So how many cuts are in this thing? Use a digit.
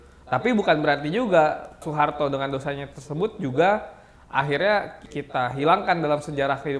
2